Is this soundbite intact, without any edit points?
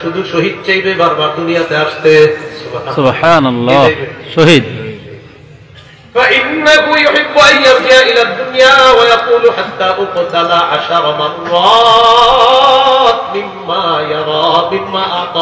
yes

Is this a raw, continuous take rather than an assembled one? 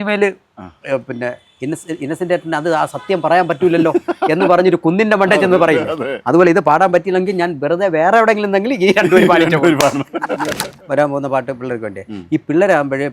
no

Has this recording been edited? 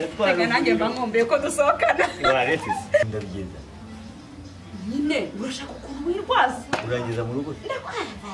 yes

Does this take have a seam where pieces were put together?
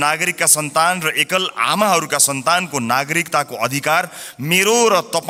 no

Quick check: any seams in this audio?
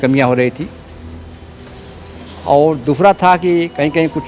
no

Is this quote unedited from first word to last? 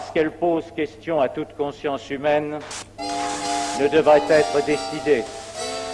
yes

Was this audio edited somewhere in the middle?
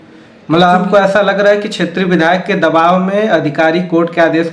no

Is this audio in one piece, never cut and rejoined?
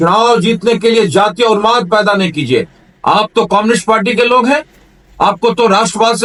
yes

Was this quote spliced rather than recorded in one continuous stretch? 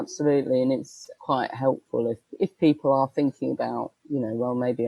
yes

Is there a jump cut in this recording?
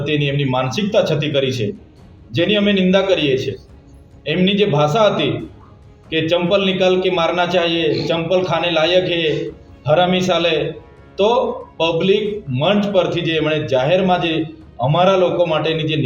no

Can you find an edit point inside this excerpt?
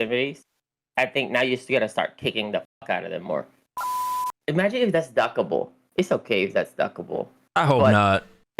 yes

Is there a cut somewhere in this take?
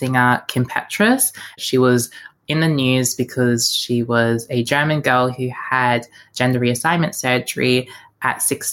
yes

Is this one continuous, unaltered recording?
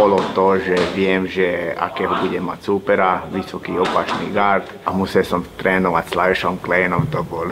yes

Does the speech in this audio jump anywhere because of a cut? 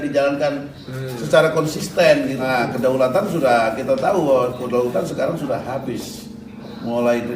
yes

